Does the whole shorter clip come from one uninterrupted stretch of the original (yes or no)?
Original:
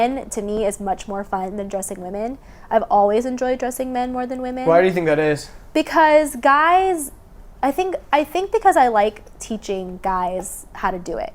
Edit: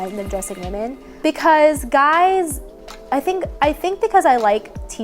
no